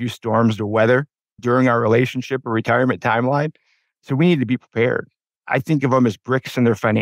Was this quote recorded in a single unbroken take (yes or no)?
yes